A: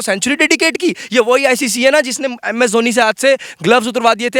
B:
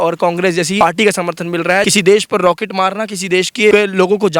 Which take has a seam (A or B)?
B